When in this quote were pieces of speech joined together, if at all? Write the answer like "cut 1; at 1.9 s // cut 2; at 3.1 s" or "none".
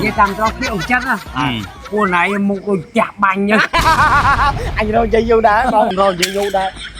cut 1; at 5.9 s